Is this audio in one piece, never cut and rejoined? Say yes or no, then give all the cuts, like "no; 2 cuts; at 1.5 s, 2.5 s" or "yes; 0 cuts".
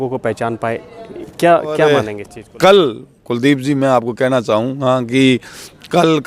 no; 1 cut; at 1.9 s